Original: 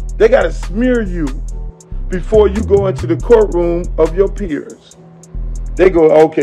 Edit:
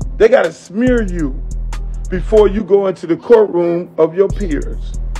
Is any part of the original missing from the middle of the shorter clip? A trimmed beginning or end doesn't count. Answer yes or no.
no